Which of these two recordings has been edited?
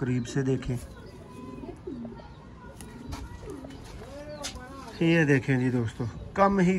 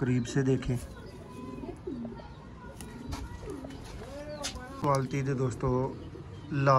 second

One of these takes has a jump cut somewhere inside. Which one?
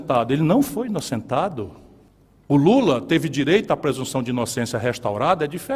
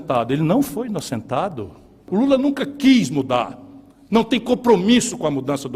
second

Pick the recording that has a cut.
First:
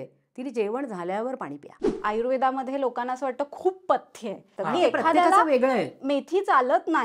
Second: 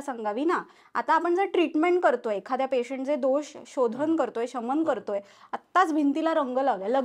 first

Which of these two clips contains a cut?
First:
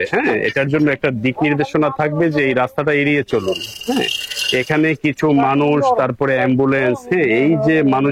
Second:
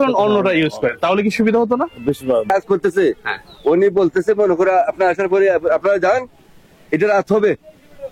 second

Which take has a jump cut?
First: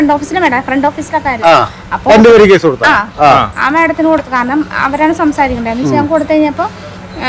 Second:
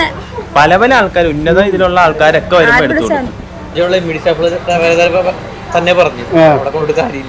second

